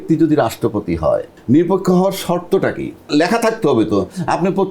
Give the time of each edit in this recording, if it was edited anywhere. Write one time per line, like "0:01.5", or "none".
0:01.3
0:03.1